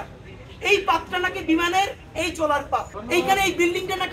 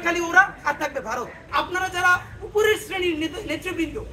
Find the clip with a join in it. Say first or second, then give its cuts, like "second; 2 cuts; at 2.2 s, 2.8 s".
second; 1 cut; at 1.4 s